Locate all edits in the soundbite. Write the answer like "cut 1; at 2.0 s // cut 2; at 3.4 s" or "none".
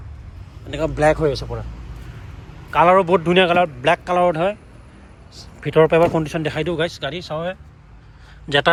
none